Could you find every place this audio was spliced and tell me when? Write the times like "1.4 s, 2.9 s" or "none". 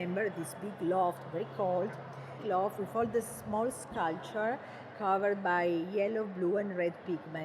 2.3 s